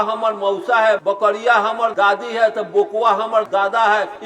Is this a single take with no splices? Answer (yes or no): no